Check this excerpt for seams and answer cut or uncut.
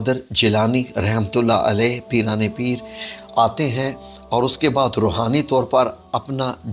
uncut